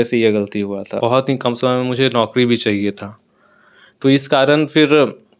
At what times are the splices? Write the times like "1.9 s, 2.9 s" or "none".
1.0 s